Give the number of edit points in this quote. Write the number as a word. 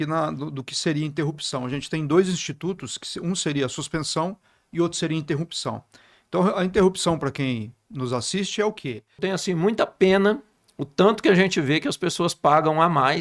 one